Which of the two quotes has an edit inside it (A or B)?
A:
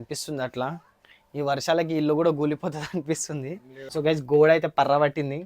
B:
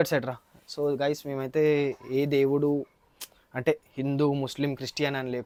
A